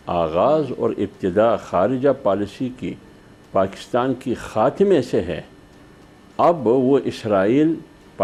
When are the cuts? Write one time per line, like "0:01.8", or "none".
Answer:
none